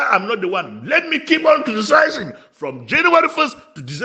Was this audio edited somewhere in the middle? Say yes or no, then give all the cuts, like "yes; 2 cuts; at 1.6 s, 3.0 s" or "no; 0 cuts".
no; 0 cuts